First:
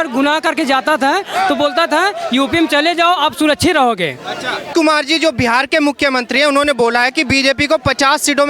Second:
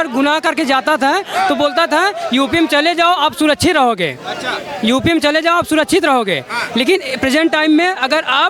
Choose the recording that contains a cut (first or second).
first